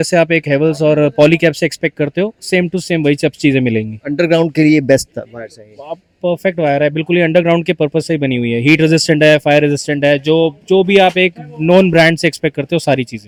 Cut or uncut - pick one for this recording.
uncut